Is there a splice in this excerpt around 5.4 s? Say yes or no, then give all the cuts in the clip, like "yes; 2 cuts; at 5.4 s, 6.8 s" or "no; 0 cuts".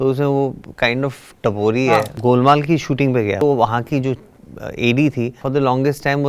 yes; 3 cuts; at 2.1 s, 3.4 s, 5.4 s